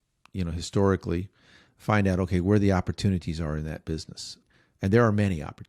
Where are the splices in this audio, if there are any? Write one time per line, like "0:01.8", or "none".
0:04.4